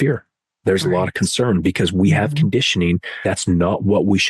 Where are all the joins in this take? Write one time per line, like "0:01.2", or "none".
0:03.1